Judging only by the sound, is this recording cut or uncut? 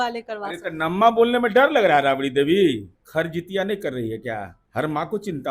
cut